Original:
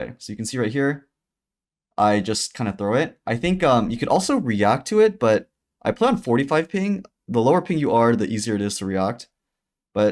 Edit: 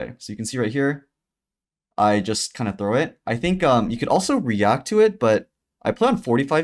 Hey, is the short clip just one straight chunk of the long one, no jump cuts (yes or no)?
yes